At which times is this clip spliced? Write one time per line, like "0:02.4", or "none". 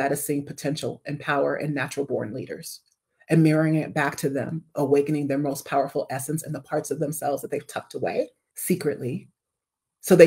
0:08.5